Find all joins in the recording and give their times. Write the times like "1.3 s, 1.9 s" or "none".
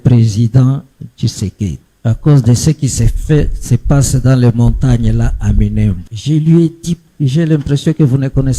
1.9 s, 6.1 s, 7.1 s